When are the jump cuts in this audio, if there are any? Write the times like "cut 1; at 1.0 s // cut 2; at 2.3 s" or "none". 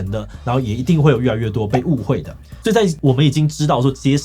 cut 1; at 2.5 s